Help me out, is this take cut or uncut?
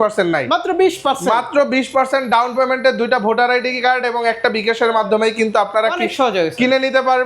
uncut